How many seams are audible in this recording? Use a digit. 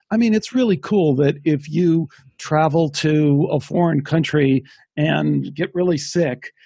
0